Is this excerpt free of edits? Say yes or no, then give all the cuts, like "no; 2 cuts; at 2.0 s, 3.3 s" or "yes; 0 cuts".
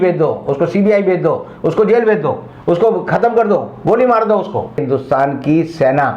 no; 1 cut; at 4.8 s